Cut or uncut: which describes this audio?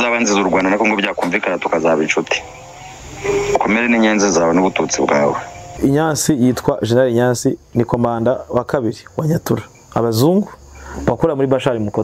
cut